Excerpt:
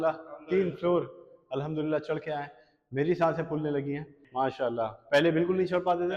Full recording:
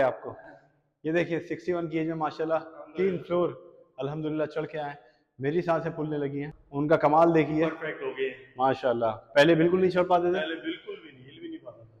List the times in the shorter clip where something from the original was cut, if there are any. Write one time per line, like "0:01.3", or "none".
0:04.1